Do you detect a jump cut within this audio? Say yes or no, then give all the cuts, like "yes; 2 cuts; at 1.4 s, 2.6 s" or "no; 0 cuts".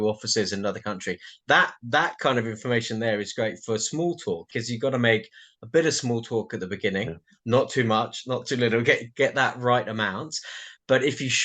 yes; 1 cut; at 4.5 s